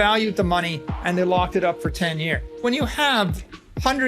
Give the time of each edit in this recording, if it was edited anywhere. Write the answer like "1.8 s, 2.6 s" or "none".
2.6 s